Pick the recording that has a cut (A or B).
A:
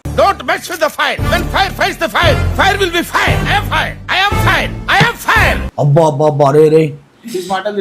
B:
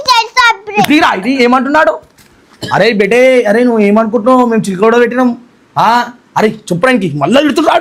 A